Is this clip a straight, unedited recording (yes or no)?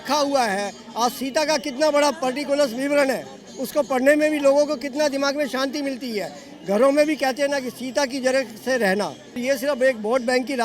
no